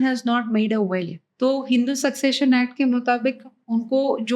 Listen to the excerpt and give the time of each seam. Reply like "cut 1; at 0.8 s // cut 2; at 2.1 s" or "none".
cut 1; at 1.2 s